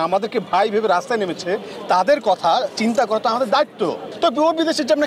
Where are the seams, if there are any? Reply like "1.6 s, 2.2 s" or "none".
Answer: 4.1 s